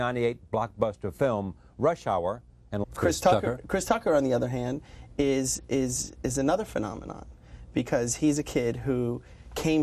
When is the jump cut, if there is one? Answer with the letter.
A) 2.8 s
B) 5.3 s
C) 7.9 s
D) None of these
D